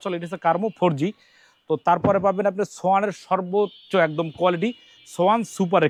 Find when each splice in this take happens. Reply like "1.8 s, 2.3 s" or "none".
none